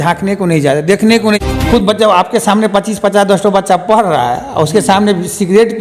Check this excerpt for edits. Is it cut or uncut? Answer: cut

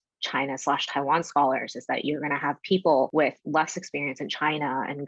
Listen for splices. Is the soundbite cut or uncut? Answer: cut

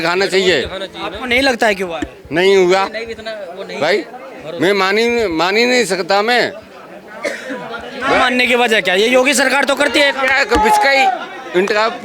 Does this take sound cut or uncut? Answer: uncut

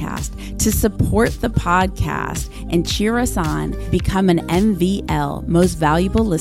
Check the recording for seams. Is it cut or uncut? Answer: uncut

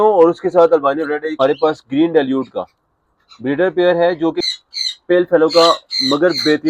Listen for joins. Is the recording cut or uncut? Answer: cut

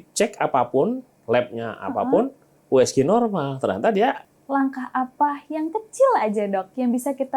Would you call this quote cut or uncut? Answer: cut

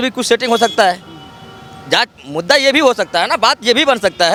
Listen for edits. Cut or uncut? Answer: uncut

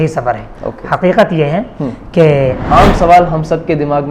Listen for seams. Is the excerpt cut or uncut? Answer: cut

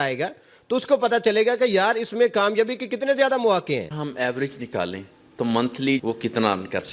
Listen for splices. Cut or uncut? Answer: cut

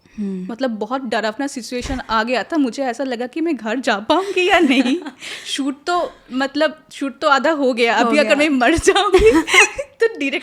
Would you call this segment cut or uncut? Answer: uncut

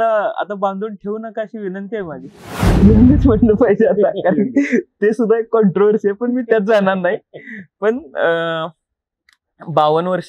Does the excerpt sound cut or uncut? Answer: cut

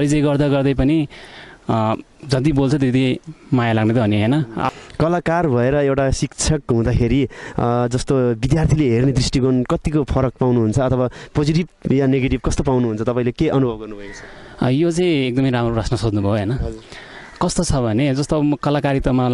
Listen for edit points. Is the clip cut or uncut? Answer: cut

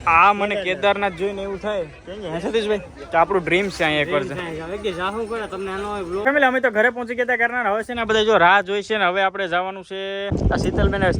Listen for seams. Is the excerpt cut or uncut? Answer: cut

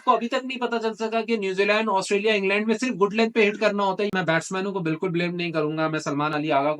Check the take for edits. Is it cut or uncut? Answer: cut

